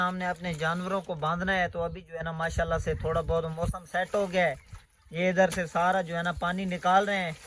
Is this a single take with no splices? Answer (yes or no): yes